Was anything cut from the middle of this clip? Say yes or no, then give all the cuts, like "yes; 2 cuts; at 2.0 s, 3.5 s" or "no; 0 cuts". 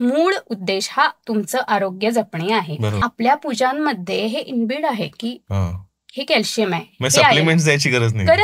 yes; 1 cut; at 3.0 s